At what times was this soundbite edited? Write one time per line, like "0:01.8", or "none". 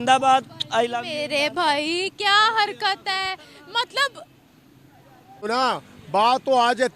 0:05.4